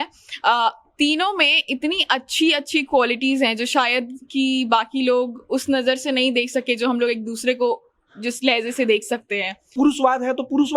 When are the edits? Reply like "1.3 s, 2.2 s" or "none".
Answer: 9.7 s